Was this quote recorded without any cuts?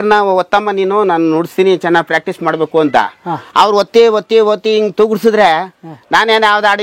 yes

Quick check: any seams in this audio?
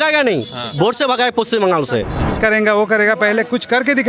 yes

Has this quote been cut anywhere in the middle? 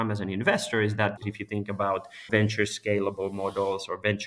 yes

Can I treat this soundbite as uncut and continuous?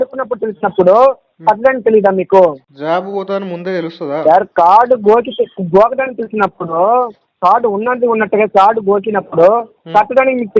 no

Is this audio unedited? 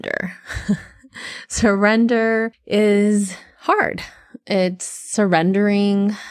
no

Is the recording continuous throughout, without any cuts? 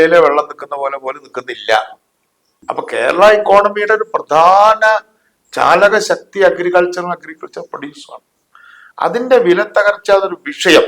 no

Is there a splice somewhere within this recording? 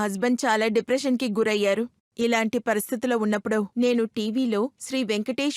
yes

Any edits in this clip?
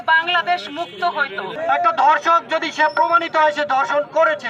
yes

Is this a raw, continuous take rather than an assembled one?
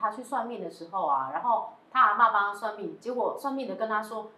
yes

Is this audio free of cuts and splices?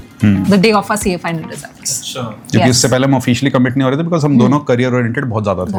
yes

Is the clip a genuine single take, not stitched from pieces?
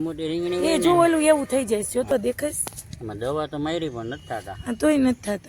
no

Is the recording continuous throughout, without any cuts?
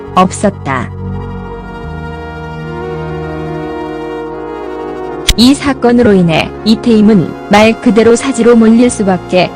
no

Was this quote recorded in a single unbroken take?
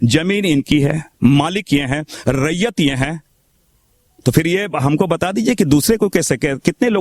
yes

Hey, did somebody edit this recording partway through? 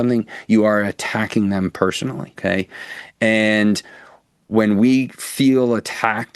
yes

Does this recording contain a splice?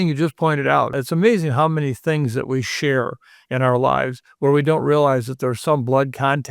yes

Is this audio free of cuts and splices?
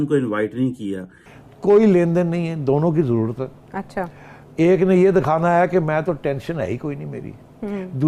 no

